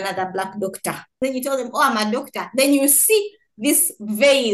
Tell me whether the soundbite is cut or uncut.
cut